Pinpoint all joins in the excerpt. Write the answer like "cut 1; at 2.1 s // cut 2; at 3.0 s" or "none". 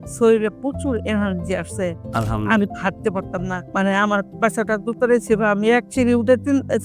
cut 1; at 3.6 s